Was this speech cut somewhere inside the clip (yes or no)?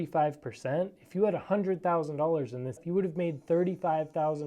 yes